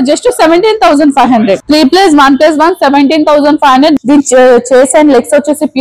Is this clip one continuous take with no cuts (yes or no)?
no